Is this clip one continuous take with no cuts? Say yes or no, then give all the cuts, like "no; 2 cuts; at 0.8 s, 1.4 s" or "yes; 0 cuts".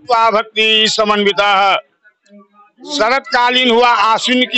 yes; 0 cuts